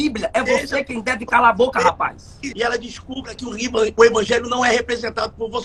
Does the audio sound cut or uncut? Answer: uncut